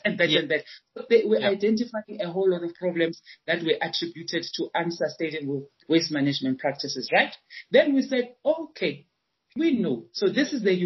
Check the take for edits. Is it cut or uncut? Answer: uncut